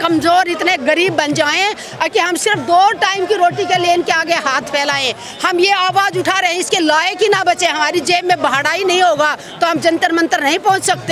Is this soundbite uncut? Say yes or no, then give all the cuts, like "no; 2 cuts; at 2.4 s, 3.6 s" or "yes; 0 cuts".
yes; 0 cuts